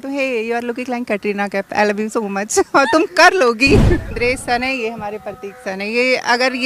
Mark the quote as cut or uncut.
cut